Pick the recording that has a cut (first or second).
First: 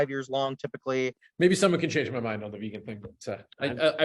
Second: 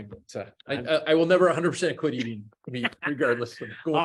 first